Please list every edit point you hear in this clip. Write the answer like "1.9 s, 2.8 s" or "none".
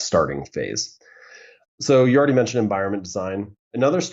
none